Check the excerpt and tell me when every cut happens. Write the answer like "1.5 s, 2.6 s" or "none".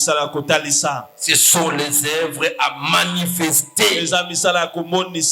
none